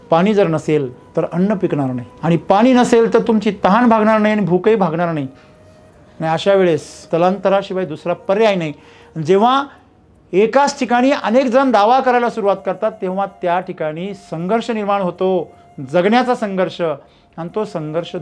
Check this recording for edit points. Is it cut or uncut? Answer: cut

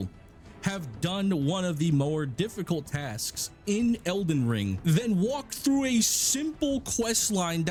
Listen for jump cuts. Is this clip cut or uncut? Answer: uncut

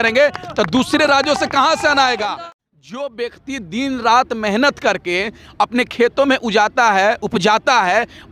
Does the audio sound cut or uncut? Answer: cut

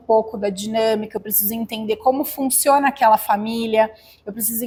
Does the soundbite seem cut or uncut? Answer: uncut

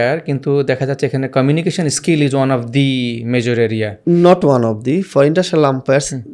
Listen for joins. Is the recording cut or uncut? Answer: uncut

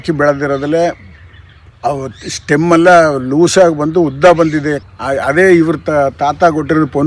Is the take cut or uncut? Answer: cut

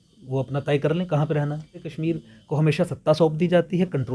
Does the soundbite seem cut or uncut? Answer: cut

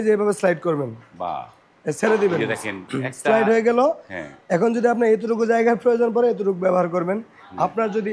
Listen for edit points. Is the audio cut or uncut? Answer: uncut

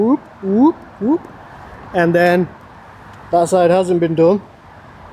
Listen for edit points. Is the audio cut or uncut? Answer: uncut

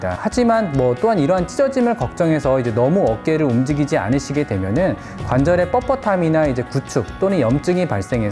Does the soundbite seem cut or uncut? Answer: uncut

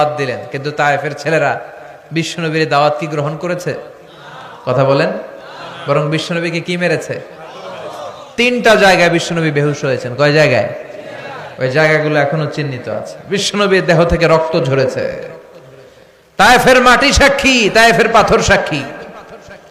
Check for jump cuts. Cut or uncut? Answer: uncut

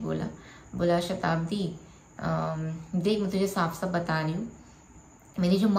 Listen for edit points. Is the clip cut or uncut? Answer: uncut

